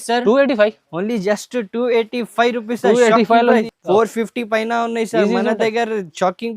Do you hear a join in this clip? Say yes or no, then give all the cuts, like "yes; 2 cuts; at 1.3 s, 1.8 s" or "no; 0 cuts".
yes; 1 cut; at 3.6 s